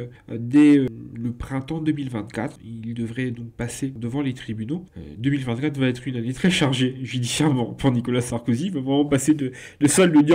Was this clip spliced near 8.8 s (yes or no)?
no